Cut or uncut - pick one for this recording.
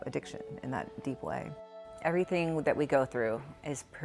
cut